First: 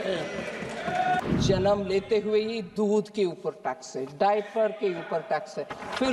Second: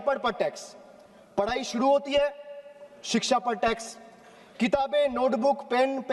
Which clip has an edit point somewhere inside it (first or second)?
first